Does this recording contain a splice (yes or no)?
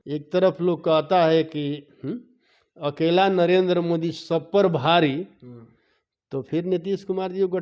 no